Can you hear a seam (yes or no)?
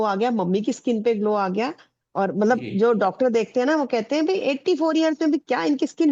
no